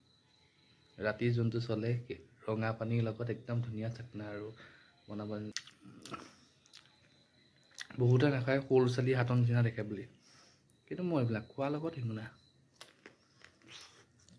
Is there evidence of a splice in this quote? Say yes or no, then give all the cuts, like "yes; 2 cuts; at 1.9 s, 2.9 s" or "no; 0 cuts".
yes; 1 cut; at 5.5 s